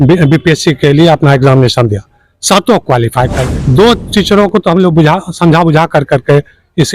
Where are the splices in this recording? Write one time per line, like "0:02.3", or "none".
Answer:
0:03.5